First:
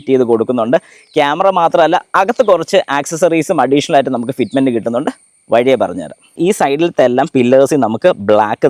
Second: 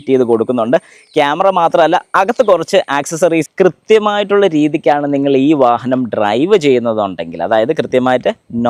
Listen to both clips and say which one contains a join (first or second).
second